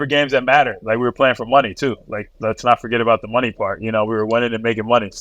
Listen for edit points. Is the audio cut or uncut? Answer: uncut